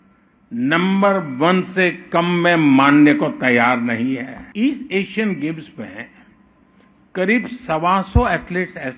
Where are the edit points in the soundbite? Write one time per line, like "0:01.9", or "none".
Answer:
0:04.4